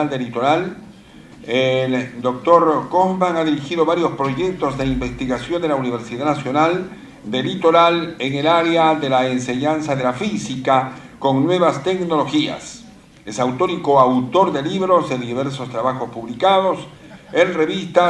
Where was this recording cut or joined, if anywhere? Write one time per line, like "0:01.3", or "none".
none